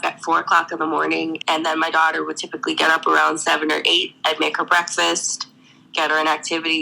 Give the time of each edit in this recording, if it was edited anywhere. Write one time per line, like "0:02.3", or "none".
0:01.4